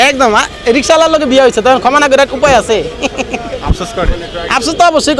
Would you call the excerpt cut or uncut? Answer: uncut